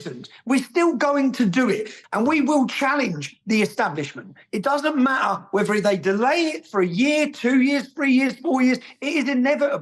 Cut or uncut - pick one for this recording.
cut